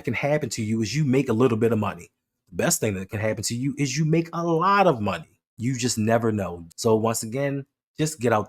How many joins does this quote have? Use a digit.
1